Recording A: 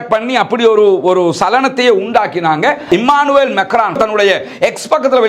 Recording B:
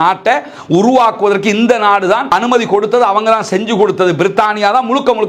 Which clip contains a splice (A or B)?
A